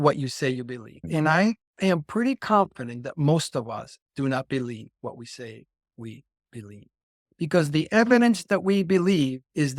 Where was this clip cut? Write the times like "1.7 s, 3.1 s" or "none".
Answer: 1.0 s